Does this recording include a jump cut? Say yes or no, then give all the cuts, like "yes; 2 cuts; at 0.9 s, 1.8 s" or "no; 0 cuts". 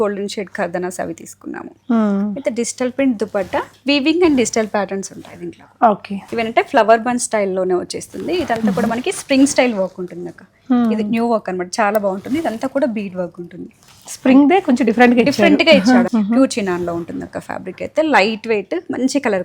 yes; 2 cuts; at 6.2 s, 16.1 s